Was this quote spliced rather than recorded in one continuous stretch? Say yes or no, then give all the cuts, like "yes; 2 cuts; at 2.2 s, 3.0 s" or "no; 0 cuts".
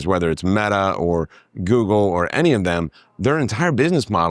no; 0 cuts